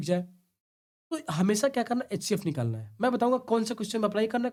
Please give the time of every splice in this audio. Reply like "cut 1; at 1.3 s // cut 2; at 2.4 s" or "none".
none

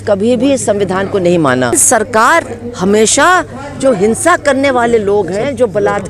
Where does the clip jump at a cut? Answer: cut 1; at 1.8 s

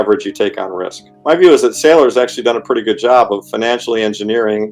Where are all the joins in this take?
cut 1; at 1.1 s

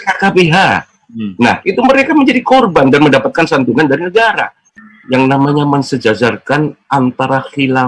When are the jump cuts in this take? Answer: cut 1; at 4.6 s

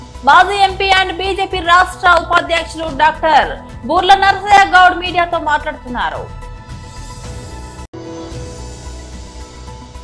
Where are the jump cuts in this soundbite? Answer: none

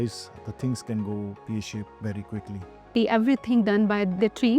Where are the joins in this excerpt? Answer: cut 1; at 2.9 s

